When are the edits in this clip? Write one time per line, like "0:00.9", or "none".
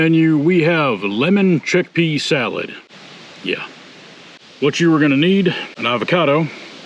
0:04.4
0:05.8

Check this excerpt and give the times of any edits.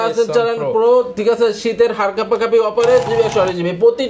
0:03.1

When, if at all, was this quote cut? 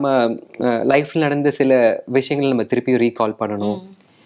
none

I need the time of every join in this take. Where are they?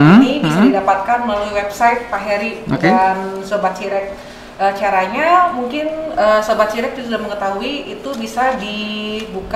none

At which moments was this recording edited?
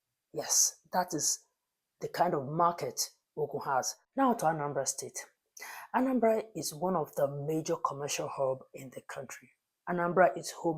0:04.0

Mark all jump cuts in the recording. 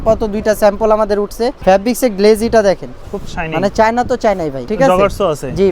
0:01.6
0:04.7

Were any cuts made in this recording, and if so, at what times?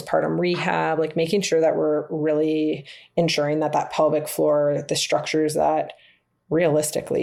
none

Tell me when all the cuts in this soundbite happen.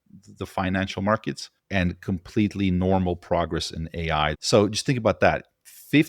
0:01.5
0:04.4

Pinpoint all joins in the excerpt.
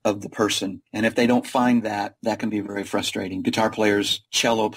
none

